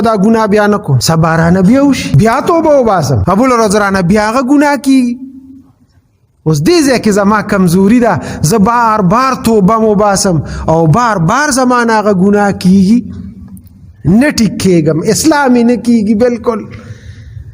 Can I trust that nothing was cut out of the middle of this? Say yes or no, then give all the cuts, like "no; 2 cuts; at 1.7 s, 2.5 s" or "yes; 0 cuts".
no; 3 cuts; at 0.9 s, 2.1 s, 3.2 s